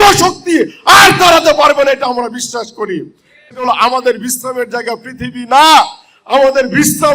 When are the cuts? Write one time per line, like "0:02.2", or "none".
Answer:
0:03.6